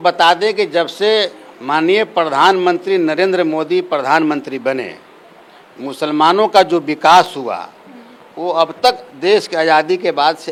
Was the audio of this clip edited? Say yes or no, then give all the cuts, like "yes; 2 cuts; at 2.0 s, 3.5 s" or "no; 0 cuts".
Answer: no; 0 cuts